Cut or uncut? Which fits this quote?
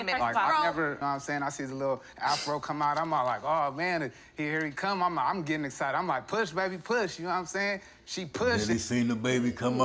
cut